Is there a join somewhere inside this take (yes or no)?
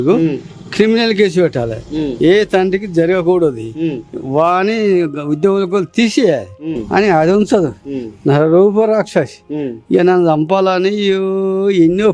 yes